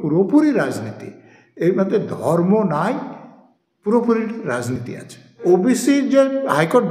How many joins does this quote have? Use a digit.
1